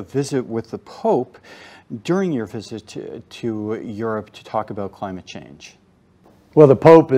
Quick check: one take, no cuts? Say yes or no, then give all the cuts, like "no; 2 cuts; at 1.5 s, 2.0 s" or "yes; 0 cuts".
yes; 0 cuts